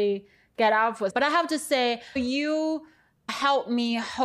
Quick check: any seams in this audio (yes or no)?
yes